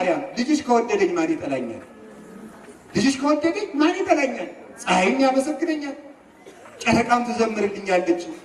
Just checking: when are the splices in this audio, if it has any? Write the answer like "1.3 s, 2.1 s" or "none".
none